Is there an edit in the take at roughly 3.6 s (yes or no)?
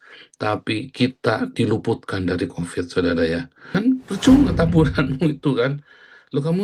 yes